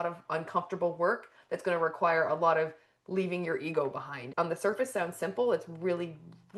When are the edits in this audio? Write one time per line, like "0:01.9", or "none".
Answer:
0:04.2